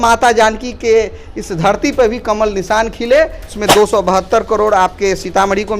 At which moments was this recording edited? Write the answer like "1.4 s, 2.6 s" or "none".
3.6 s